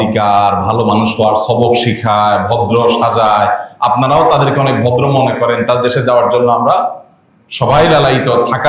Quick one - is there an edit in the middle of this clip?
no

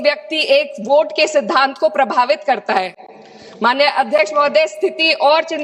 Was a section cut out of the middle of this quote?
no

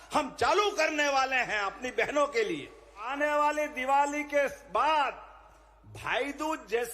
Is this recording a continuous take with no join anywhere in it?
no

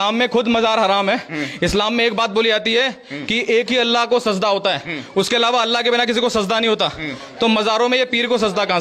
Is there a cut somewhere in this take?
no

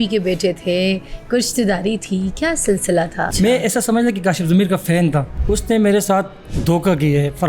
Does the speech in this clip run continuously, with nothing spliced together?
no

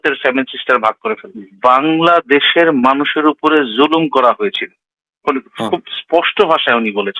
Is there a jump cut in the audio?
yes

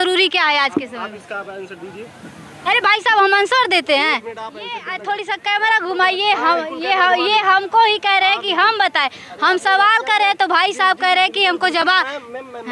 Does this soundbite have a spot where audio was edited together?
yes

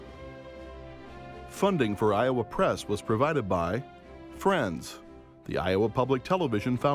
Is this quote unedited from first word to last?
no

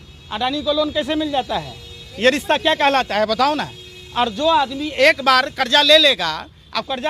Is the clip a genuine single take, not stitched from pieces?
yes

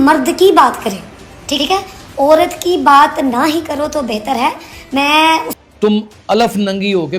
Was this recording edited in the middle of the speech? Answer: yes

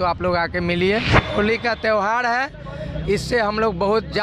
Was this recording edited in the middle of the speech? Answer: yes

